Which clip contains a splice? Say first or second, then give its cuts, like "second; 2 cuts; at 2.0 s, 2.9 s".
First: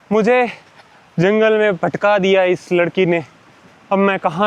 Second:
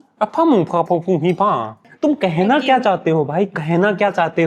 second; 1 cut; at 1.8 s